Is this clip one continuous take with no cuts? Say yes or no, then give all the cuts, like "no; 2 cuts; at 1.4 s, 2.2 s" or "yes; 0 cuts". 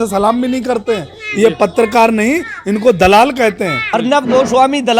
no; 1 cut; at 3.8 s